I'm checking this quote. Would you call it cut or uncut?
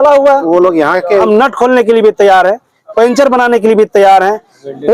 cut